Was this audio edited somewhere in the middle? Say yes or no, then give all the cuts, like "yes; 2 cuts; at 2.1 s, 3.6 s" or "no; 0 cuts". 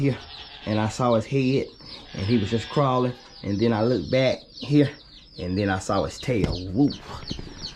no; 0 cuts